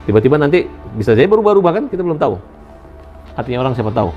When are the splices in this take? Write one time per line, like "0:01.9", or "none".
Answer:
none